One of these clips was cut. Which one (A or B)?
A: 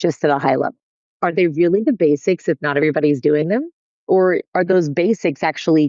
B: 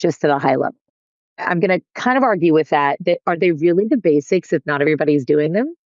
A